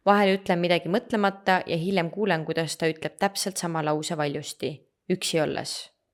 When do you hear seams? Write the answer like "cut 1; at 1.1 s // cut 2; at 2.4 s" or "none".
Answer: none